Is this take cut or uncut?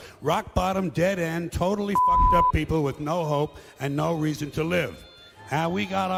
uncut